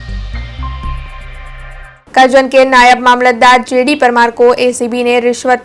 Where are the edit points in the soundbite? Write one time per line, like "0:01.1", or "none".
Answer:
0:02.0